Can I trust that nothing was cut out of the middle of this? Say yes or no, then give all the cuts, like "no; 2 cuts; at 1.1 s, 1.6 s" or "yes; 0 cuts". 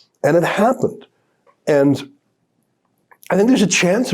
yes; 0 cuts